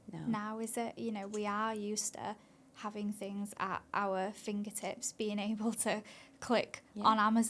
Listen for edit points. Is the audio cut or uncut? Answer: uncut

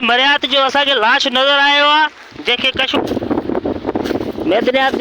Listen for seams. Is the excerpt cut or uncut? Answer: cut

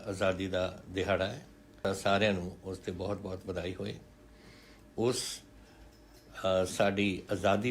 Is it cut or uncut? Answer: cut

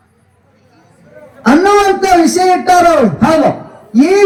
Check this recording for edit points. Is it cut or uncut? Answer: uncut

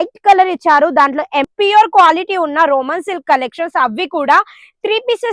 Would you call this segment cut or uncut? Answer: cut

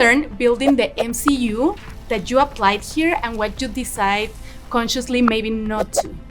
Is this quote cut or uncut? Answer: uncut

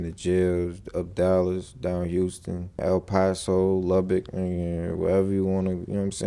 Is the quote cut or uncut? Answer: uncut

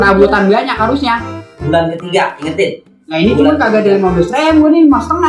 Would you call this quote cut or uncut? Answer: cut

